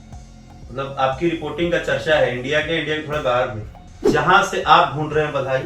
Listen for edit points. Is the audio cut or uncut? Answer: cut